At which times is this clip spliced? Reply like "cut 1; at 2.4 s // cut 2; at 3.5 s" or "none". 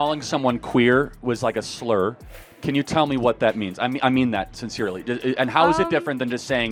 none